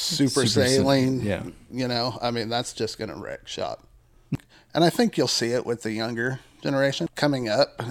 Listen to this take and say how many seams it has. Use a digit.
2